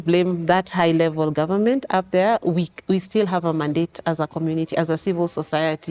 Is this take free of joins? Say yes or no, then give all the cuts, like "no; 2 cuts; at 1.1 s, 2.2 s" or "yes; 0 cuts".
yes; 0 cuts